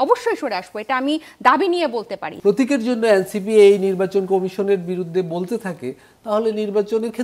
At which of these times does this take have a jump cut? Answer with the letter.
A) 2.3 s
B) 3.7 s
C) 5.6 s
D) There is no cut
A